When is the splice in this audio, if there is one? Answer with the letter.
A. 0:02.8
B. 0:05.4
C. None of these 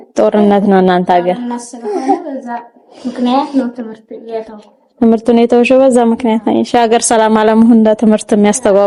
C